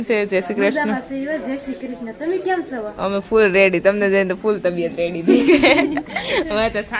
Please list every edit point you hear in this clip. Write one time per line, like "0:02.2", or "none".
none